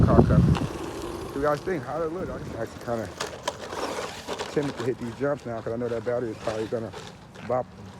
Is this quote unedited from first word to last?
no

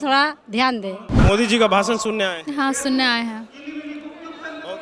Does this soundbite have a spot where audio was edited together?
yes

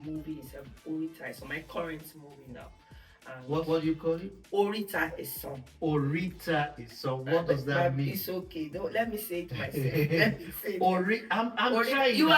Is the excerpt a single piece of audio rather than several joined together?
yes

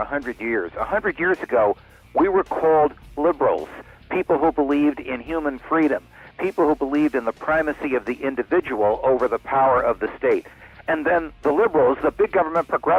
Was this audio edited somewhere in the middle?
no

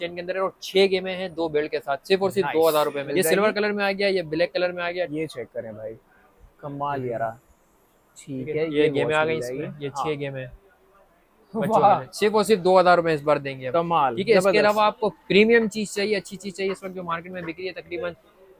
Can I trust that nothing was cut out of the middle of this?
yes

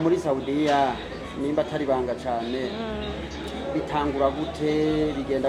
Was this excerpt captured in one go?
yes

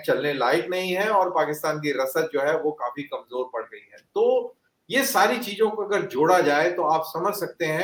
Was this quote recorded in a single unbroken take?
yes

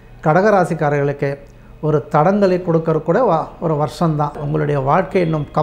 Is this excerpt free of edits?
no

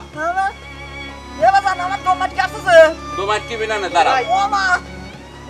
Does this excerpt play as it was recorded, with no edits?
yes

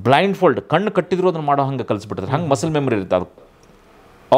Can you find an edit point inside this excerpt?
yes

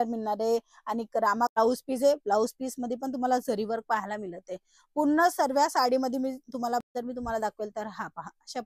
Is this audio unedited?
no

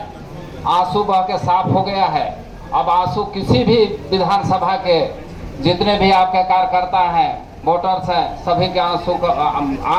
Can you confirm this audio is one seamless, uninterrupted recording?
yes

